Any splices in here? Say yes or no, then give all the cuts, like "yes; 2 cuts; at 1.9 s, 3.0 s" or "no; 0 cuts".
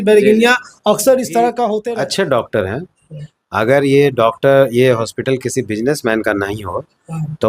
yes; 1 cut; at 1.9 s